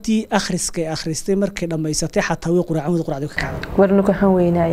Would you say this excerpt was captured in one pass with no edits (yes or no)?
yes